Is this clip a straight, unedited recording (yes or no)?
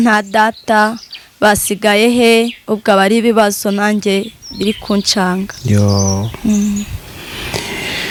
yes